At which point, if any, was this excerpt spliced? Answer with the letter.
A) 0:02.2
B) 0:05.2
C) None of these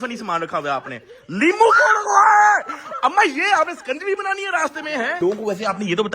B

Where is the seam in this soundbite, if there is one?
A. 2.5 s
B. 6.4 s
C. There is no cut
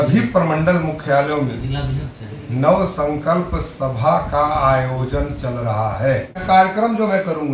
B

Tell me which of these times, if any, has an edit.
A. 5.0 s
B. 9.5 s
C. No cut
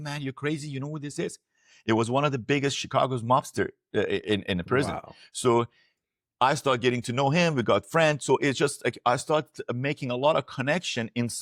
C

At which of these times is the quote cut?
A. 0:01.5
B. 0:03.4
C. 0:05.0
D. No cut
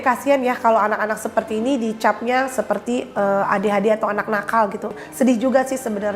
C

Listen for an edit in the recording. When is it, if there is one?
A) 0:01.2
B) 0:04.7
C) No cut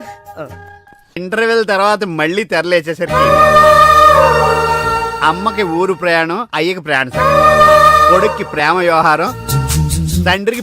A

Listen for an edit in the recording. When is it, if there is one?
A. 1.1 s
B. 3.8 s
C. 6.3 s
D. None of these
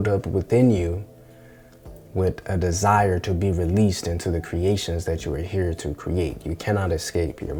D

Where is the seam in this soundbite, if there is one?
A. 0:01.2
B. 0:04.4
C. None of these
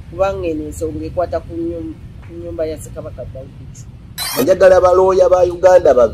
B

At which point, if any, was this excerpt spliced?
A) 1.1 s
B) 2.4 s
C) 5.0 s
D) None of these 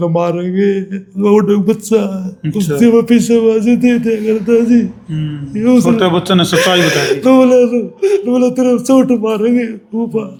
D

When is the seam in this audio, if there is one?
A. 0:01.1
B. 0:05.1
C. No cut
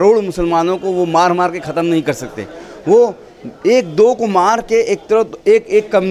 C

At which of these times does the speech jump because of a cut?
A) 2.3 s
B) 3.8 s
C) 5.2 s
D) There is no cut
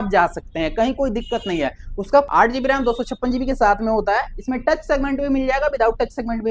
A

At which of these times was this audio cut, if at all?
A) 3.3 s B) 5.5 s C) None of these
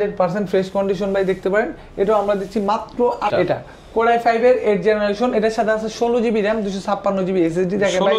A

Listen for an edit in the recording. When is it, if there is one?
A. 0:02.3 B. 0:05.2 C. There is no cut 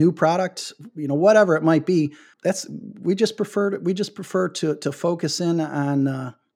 A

